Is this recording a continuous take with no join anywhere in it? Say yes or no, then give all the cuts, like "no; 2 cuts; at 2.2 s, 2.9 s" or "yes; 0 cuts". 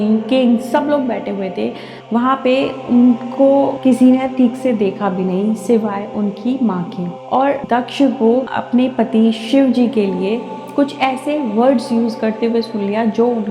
no; 2 cuts; at 2.0 s, 7.6 s